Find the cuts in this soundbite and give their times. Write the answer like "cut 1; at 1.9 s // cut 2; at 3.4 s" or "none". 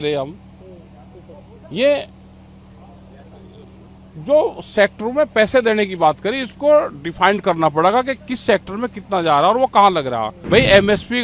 cut 1; at 10.3 s

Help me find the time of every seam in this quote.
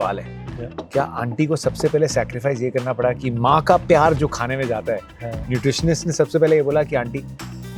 none

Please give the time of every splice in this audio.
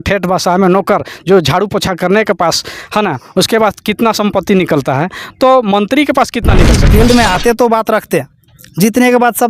cut 1; at 6.8 s

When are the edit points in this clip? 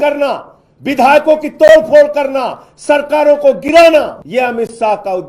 cut 1; at 4.2 s

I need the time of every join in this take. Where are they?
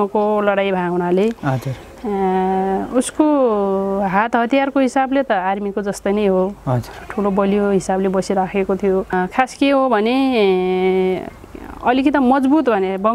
cut 1; at 9.1 s

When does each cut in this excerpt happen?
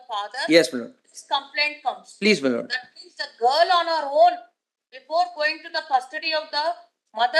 none

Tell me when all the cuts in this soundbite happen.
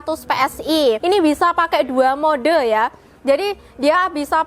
cut 1; at 1.0 s

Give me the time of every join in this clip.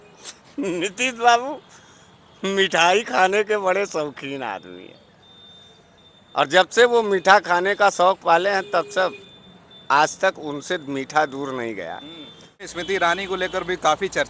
cut 1; at 12.7 s

